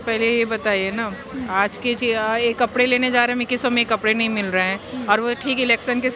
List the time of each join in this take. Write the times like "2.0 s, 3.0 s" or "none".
none